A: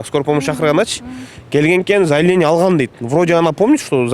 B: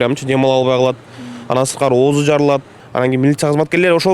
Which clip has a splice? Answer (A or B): B